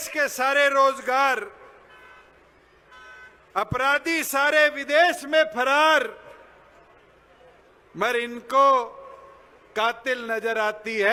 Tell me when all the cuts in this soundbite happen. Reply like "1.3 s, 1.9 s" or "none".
none

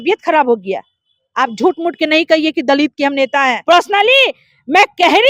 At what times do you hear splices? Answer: 3.6 s

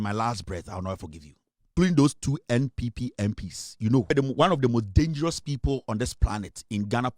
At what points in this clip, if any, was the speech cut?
1.7 s, 4.1 s

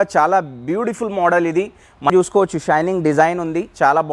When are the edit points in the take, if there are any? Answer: 2.1 s

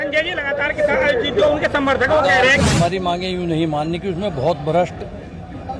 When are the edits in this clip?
2.6 s

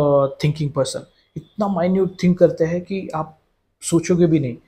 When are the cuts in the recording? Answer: none

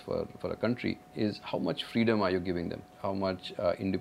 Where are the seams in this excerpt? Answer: 1.1 s, 2.9 s

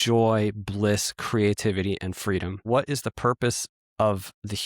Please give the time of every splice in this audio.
2.7 s

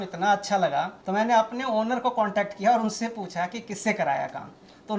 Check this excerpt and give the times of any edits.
1.0 s

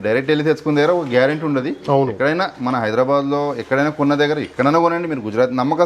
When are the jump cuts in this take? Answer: none

